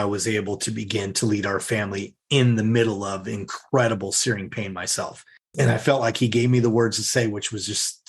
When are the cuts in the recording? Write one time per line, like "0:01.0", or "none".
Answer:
0:05.6